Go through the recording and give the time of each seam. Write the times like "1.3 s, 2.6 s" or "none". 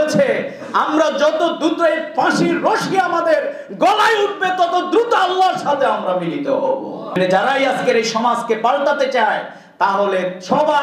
7.2 s